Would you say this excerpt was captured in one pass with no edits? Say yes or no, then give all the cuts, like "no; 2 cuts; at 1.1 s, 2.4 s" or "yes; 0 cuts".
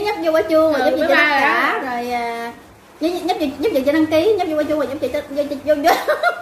yes; 0 cuts